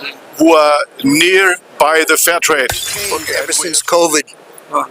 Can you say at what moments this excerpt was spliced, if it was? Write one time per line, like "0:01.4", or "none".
0:03.4